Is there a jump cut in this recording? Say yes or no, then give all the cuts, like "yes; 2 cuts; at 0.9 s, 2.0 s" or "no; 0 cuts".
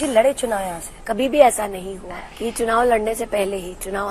yes; 1 cut; at 0.9 s